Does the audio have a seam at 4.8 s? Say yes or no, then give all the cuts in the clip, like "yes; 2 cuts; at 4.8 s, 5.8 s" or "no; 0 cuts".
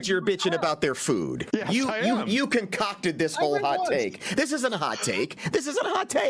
no; 1 cut; at 1.4 s